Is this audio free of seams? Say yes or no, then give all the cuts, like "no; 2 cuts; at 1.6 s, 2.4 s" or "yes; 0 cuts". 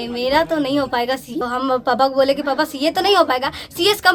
no; 1 cut; at 1.3 s